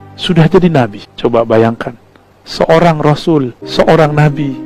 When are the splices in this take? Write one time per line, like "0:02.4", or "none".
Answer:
0:01.0
0:03.6